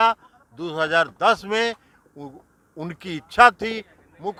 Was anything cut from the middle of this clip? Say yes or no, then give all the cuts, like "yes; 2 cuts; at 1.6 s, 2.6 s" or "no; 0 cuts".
no; 0 cuts